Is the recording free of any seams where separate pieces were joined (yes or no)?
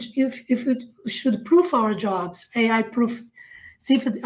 yes